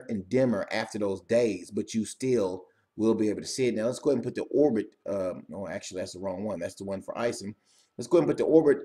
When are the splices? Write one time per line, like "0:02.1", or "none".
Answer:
0:03.8